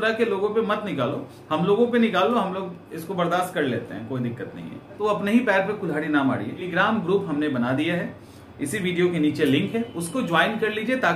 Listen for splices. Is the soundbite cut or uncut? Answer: cut